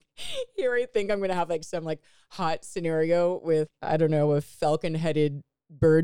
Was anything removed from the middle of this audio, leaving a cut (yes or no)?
yes